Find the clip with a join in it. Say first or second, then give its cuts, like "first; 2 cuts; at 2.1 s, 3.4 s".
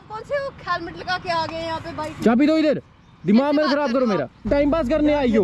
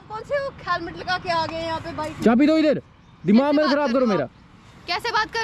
first; 1 cut; at 4.5 s